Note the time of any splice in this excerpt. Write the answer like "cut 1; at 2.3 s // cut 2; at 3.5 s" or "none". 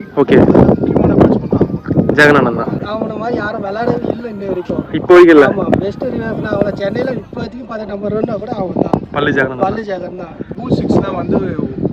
cut 1; at 2.8 s // cut 2; at 10.6 s